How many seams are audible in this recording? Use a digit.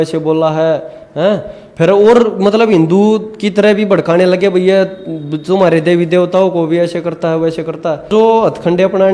1